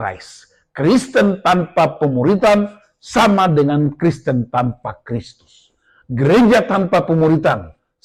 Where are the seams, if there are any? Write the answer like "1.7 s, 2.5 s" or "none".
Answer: none